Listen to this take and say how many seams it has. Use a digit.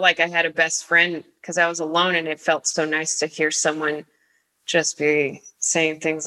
0